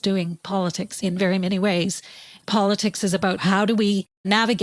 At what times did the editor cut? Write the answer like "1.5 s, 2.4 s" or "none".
0.9 s, 2.2 s